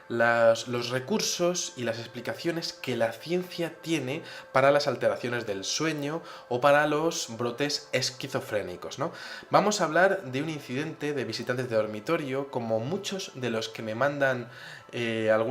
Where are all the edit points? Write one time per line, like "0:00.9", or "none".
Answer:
0:02.4